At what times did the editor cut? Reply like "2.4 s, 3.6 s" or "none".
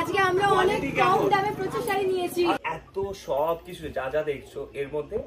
2.6 s